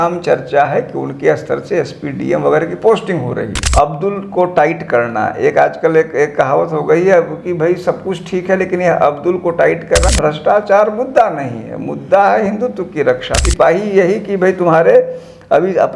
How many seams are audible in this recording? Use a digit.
3